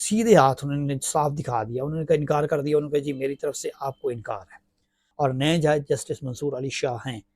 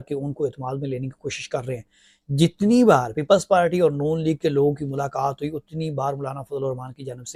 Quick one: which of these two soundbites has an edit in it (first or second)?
first